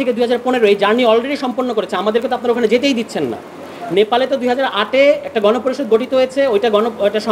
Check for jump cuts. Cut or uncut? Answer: uncut